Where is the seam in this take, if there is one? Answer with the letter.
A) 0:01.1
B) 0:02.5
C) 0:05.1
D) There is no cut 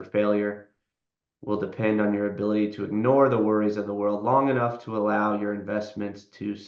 D